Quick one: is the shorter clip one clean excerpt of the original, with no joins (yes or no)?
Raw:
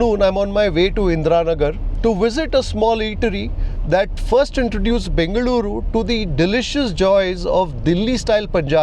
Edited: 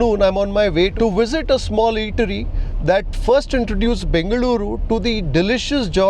no